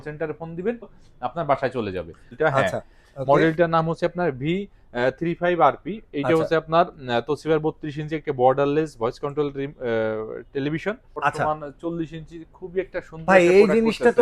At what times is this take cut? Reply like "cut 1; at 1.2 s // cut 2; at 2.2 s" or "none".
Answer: cut 1; at 1.0 s // cut 2; at 2.3 s // cut 3; at 11.1 s